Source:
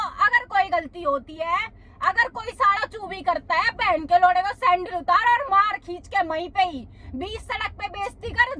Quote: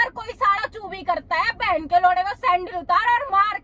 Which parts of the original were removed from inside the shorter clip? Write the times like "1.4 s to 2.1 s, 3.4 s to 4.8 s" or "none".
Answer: none